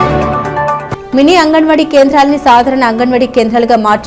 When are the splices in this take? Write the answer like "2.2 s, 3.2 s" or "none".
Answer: 0.9 s